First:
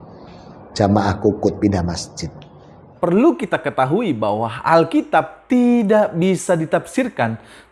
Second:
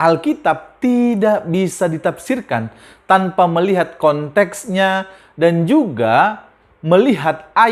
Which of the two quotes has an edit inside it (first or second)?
first